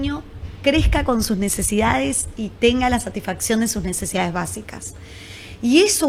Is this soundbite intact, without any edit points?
yes; 0 cuts

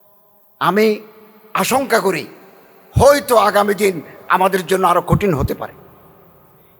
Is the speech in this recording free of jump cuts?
yes; 0 cuts

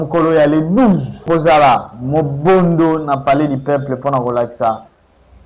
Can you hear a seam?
yes; 1 cut; at 1.3 s

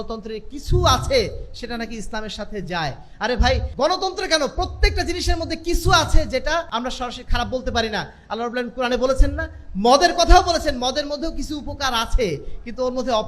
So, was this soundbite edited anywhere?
yes; 2 cuts; at 3.7 s, 6.7 s

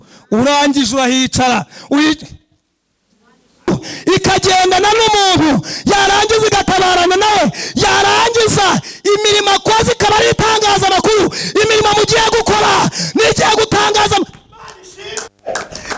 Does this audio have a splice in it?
yes; 1 cut; at 3.7 s

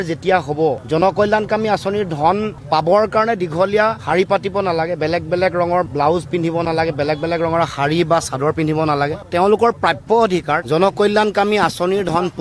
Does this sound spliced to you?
yes; 1 cut; at 10.7 s

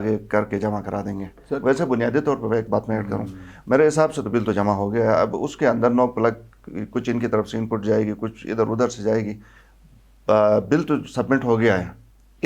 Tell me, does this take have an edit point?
no; 0 cuts

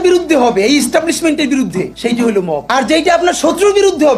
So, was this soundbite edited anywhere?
no; 0 cuts

